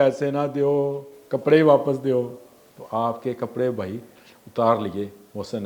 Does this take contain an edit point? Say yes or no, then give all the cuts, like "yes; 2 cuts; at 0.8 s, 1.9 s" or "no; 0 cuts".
no; 0 cuts